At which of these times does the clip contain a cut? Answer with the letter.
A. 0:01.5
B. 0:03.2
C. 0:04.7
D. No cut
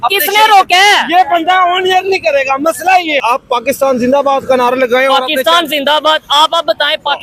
B